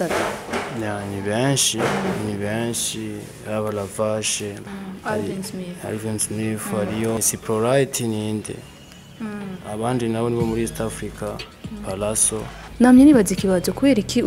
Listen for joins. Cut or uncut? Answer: cut